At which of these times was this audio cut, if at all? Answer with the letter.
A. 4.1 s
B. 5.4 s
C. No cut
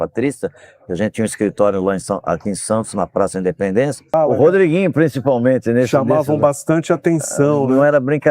A